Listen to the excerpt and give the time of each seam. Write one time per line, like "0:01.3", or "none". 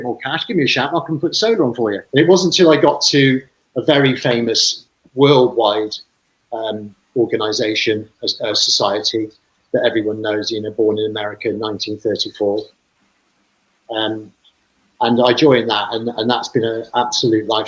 0:02.0